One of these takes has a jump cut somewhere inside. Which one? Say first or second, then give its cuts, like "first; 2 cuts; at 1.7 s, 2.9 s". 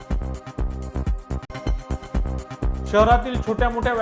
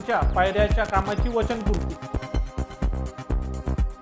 first; 1 cut; at 1.4 s